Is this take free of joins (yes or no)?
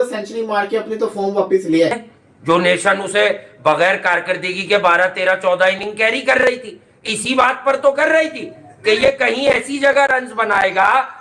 no